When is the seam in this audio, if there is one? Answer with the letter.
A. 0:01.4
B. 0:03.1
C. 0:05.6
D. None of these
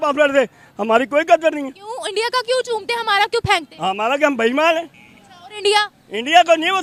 D